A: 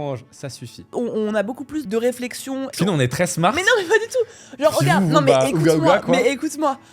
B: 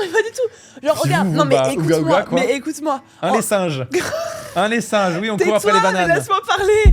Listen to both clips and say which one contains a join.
A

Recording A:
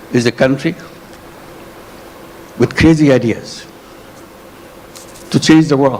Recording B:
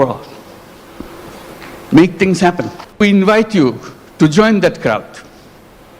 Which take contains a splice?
B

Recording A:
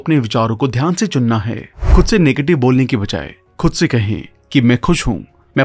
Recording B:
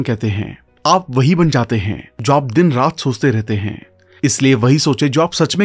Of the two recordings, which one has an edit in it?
A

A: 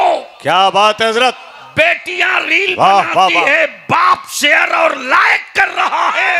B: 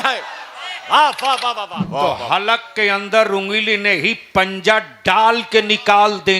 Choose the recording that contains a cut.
B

